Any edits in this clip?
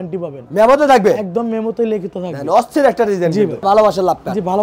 yes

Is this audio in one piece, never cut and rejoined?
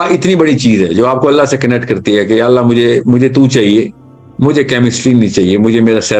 yes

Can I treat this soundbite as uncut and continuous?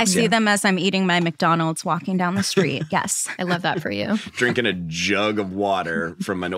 yes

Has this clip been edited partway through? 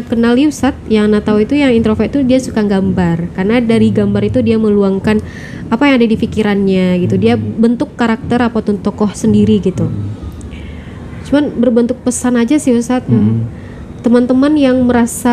no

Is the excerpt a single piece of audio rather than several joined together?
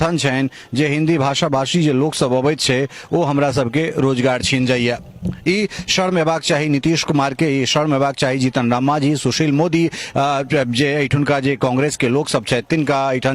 yes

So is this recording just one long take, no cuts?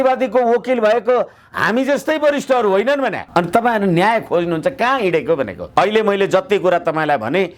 no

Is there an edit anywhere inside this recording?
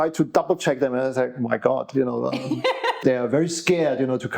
yes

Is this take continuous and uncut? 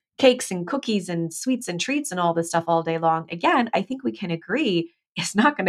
yes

